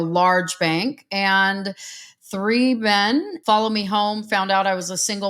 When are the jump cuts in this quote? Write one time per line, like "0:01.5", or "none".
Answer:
0:03.3